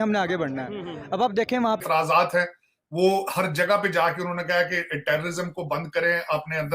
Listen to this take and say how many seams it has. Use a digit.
1